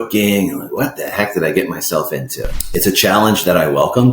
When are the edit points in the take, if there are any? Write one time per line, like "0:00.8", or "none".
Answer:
0:02.4